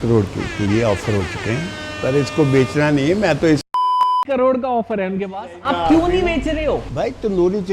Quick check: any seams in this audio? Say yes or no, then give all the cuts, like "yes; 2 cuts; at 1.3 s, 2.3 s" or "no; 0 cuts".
no; 0 cuts